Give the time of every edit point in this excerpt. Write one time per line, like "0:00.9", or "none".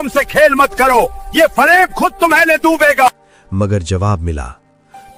none